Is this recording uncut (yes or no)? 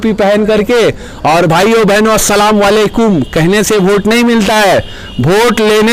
yes